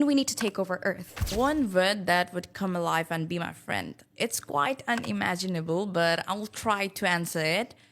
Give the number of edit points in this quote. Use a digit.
1